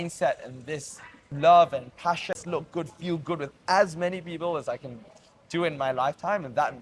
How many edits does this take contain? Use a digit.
1